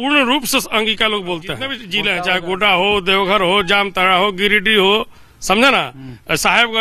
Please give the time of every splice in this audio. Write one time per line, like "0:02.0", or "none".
0:01.9